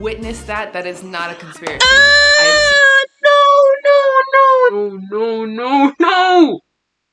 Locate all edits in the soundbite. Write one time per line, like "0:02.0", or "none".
0:04.7